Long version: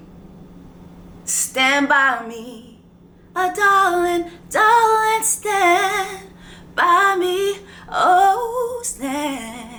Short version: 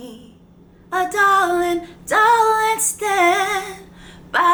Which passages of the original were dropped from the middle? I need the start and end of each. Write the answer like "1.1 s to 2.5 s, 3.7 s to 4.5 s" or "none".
none